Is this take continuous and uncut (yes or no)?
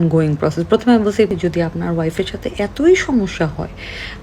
no